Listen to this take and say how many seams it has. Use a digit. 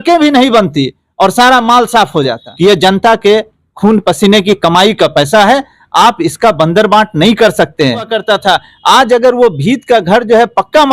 2